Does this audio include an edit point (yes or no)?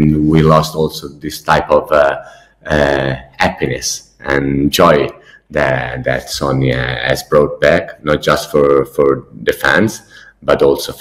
no